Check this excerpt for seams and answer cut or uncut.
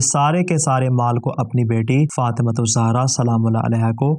uncut